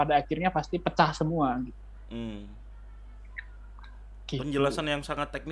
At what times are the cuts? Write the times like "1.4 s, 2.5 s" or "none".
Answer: none